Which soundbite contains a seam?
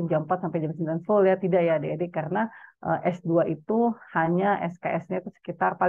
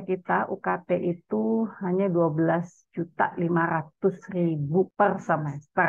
second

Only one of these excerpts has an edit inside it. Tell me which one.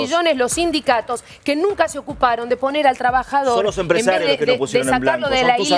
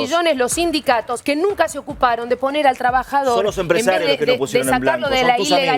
second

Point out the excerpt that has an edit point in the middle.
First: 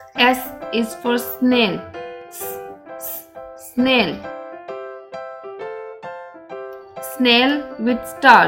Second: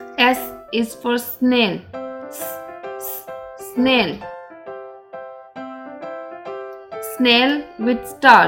first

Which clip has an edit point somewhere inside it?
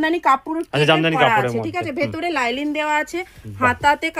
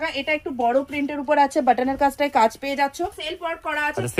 second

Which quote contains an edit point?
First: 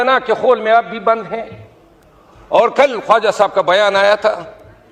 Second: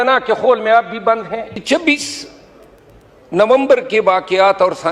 second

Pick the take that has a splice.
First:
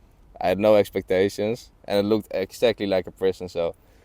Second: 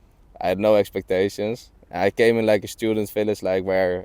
first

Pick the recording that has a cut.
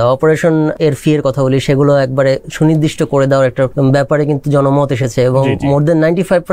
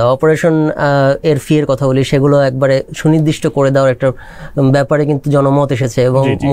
first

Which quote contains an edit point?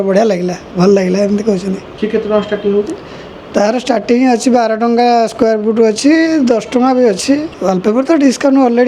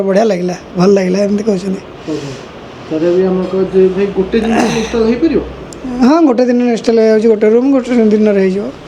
first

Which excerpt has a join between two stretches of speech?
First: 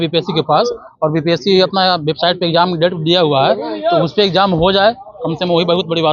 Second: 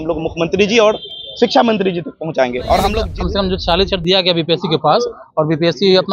second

